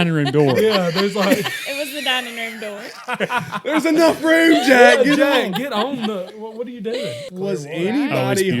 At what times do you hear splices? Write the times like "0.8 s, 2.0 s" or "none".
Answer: 7.3 s